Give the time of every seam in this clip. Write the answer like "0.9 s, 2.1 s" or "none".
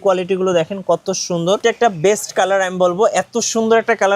1.6 s